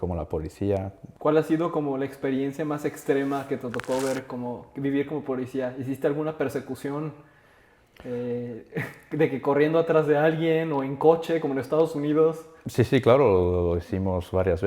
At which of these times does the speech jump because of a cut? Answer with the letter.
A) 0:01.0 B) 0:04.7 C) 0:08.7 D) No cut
A